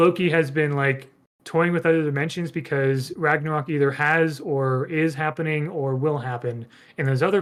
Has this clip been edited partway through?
no; 0 cuts

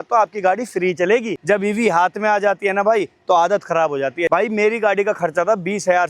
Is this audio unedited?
no; 2 cuts; at 1.3 s, 4.3 s

